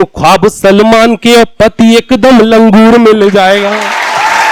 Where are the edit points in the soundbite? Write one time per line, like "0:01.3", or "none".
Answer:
none